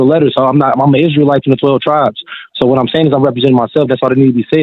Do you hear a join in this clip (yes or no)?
no